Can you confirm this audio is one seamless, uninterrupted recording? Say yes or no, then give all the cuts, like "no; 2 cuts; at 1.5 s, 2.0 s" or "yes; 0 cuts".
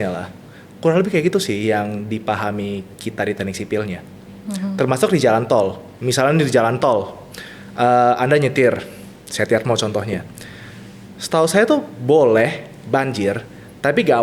yes; 0 cuts